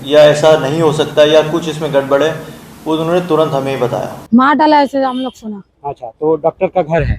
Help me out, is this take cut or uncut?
cut